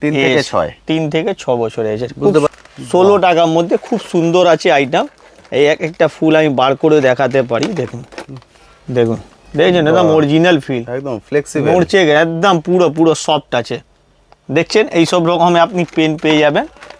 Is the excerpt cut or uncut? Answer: cut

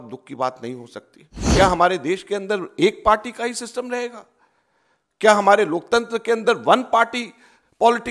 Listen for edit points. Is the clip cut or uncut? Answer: cut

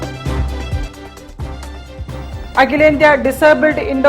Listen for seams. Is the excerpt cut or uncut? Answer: cut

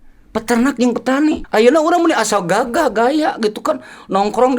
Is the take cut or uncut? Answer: cut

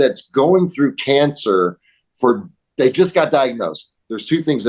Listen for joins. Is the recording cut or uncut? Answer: uncut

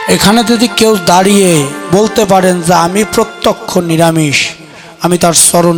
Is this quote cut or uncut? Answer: uncut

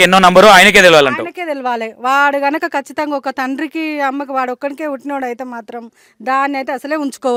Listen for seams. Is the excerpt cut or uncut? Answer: uncut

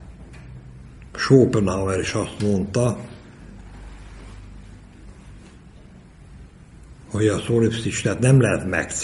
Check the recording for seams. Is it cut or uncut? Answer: uncut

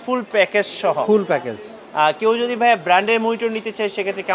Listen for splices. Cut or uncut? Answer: uncut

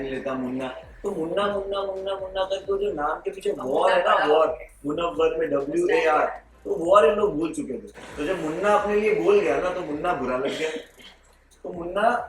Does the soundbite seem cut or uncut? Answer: uncut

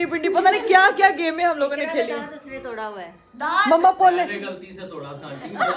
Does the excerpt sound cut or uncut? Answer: uncut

